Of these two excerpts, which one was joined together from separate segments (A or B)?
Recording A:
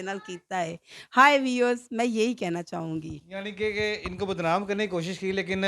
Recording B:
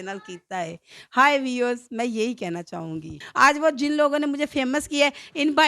B